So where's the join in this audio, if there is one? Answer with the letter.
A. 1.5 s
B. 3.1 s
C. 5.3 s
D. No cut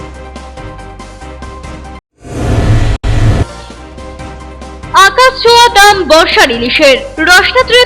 A